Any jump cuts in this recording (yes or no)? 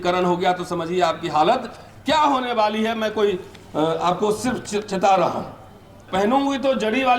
yes